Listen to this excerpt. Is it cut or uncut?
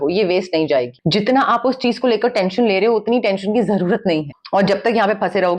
cut